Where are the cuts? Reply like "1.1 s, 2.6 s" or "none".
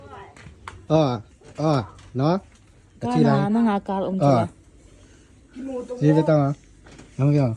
none